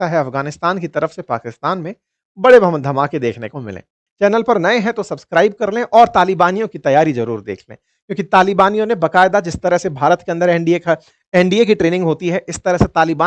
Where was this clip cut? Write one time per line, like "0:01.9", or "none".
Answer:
0:03.7

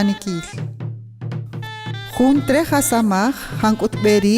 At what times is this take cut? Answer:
0:01.8

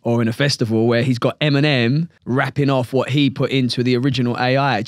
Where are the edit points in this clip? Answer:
0:02.1

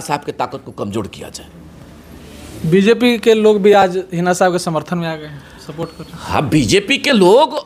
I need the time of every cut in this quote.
none

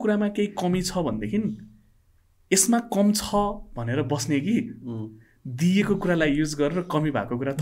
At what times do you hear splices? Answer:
none

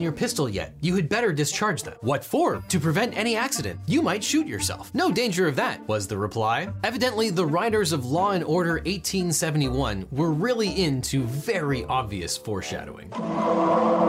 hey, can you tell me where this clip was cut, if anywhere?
0:02.6
0:03.7
0:05.8
0:13.0

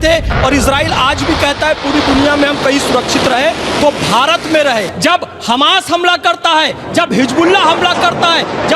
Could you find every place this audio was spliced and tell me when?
0:04.9

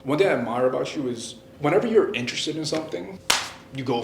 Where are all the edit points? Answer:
0:01.5
0:03.1

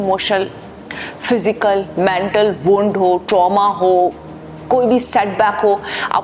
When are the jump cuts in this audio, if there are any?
none

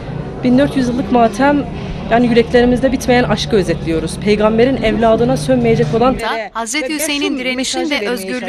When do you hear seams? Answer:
none

